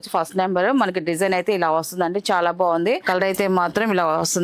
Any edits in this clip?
yes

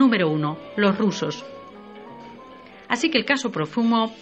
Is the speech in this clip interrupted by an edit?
yes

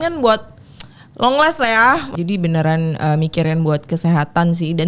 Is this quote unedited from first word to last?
no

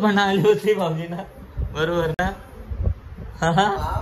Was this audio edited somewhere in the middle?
no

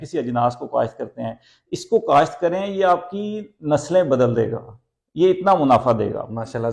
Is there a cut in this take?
no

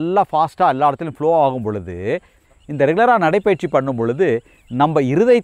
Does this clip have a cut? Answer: yes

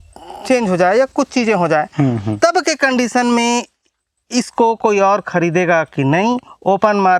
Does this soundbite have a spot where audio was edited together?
no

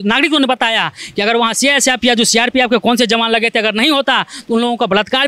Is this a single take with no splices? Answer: yes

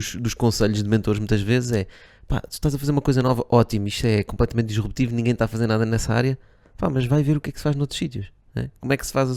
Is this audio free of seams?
yes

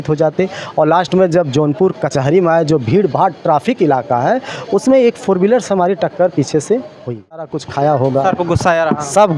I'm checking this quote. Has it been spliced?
yes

